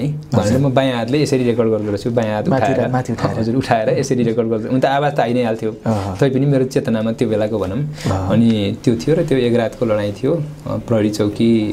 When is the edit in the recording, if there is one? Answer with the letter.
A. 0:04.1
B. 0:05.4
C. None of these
C